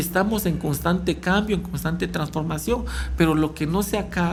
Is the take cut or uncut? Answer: uncut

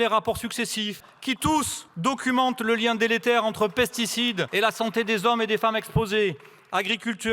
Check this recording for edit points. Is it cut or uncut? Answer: cut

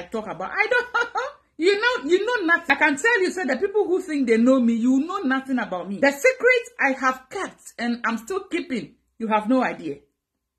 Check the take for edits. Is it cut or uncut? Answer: cut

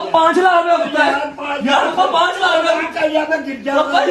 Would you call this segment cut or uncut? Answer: uncut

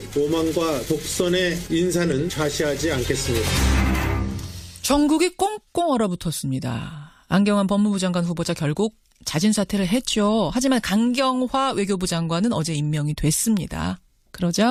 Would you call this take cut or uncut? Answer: uncut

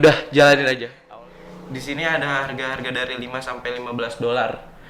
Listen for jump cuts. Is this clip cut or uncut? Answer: cut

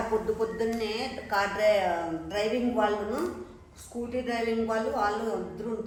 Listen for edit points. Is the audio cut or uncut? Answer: uncut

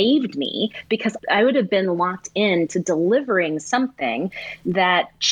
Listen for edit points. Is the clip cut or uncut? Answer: uncut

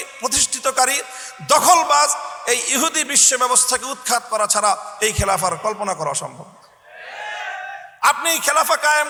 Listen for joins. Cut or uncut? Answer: uncut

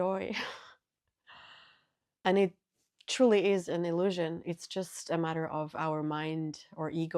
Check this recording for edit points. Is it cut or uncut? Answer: cut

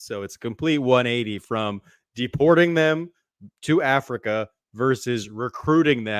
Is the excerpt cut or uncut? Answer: uncut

